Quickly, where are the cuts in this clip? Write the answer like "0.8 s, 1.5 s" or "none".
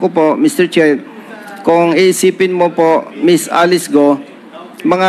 none